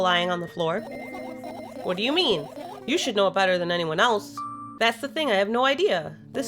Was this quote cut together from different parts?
yes; 1 cut; at 4.7 s

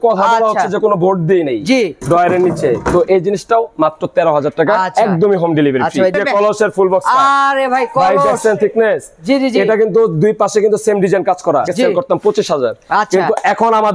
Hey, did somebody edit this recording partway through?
no; 0 cuts

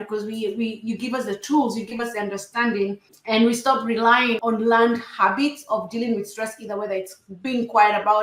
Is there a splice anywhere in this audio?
yes; 1 cut; at 4.4 s

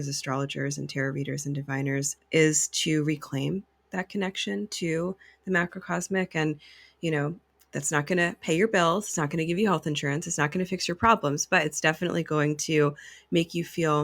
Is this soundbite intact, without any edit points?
no; 1 cut; at 2.2 s

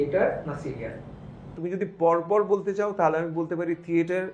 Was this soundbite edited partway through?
yes; 1 cut; at 1.5 s

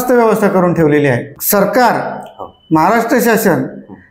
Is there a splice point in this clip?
yes; 1 cut; at 1.3 s

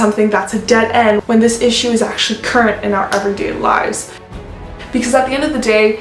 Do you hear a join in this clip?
yes; 1 cut; at 4.3 s

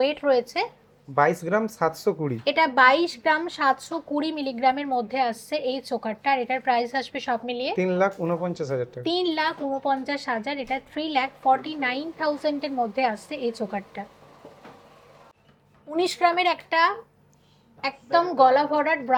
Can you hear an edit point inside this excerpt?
no; 0 cuts

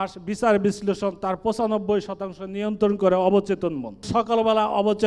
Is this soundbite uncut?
no; 1 cut; at 4.1 s

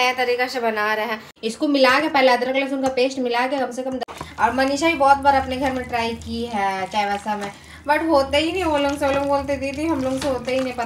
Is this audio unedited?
no; 2 cuts; at 1.3 s, 4.1 s

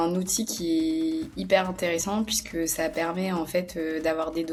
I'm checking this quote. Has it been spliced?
no; 0 cuts

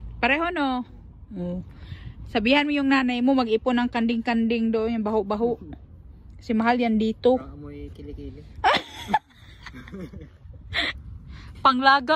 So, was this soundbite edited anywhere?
yes; 1 cut; at 10.9 s

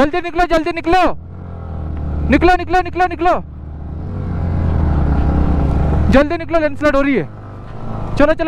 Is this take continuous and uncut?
yes; 0 cuts

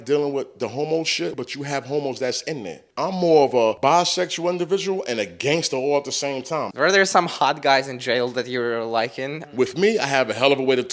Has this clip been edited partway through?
yes; 5 cuts; at 1.3 s, 2.8 s, 3.8 s, 6.7 s, 9.4 s

